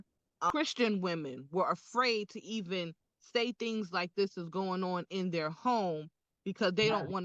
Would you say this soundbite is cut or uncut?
uncut